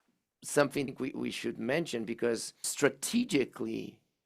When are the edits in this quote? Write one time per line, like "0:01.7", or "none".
0:02.6